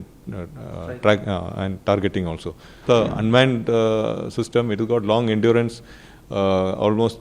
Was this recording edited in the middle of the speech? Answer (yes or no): yes